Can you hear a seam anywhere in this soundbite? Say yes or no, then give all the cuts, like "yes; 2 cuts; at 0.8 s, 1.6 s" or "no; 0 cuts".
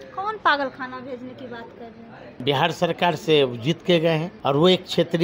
yes; 2 cuts; at 2.3 s, 4.3 s